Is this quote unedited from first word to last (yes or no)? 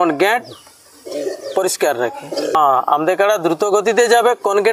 no